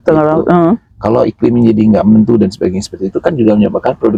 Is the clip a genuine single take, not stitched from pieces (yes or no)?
yes